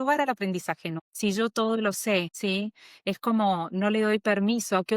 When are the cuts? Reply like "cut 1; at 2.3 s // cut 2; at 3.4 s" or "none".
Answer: cut 1; at 0.9 s // cut 2; at 2.3 s